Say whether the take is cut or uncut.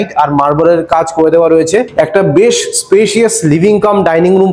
cut